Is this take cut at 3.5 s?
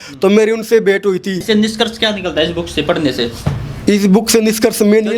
no; 1 cut; at 1.4 s

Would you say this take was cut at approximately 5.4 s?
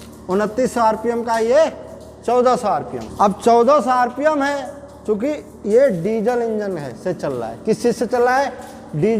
no; 1 cut; at 3.0 s

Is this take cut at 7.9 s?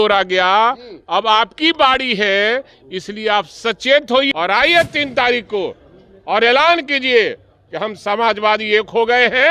no; 1 cut; at 4.3 s

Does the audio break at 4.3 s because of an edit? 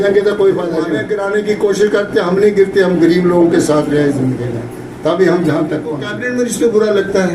no; 2 cuts; at 1.0 s, 6.1 s

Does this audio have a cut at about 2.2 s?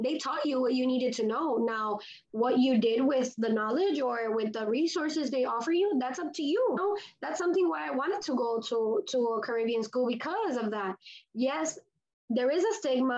no; 1 cut; at 6.8 s

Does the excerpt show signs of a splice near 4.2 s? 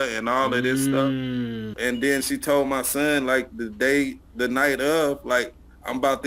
no; 1 cut; at 1.7 s

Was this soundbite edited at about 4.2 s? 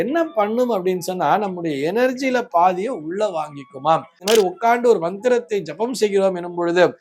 yes; 1 cut; at 4.2 s

